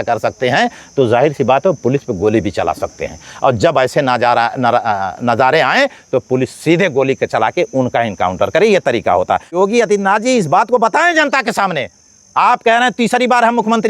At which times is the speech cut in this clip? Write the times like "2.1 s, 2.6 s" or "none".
9.6 s